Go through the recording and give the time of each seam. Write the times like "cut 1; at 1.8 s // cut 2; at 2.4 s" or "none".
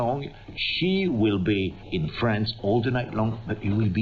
cut 1; at 1.8 s